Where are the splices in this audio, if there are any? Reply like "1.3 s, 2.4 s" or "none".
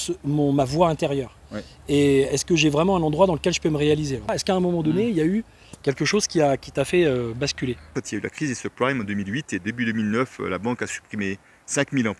4.3 s, 7.9 s